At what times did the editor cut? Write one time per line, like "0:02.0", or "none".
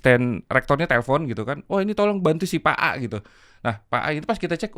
none